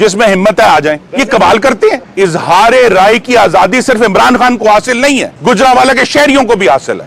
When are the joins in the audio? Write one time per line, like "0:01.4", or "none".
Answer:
0:01.1
0:02.1
0:05.3